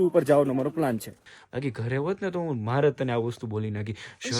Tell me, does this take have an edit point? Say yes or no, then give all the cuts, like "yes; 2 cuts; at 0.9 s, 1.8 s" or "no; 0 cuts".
yes; 1 cut; at 1.2 s